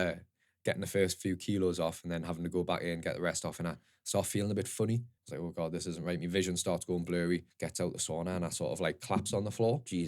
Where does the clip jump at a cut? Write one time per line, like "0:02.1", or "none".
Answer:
0:05.2
0:07.6